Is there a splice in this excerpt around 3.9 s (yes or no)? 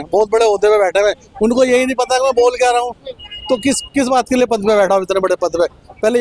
no